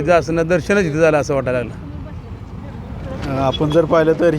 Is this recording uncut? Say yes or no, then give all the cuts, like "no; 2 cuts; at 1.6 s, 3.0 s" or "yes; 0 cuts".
yes; 0 cuts